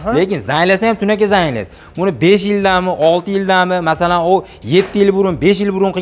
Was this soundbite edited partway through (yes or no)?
no